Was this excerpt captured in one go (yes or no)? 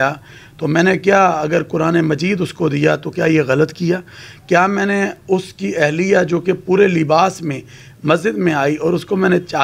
yes